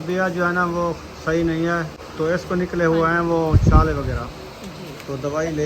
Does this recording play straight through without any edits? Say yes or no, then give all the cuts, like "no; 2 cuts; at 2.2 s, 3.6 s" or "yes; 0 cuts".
no; 1 cut; at 2.0 s